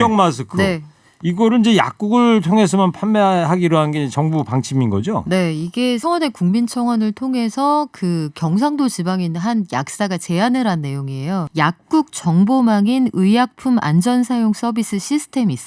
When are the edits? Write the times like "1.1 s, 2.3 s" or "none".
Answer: 6.0 s, 11.4 s